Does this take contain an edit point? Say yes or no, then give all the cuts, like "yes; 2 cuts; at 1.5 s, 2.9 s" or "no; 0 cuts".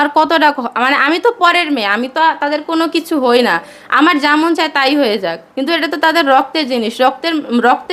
no; 0 cuts